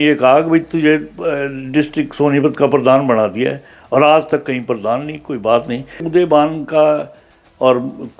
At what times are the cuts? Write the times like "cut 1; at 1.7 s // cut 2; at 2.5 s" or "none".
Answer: cut 1; at 6.1 s